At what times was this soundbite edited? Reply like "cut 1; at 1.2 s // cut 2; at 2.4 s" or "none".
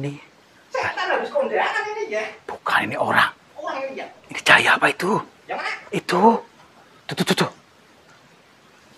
cut 1; at 4.2 s